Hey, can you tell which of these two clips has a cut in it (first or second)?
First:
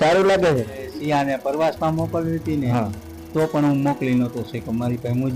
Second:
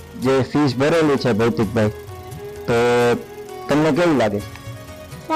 first